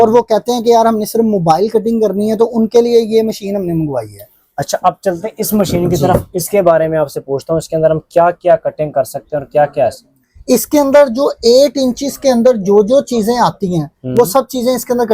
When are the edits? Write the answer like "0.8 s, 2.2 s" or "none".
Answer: none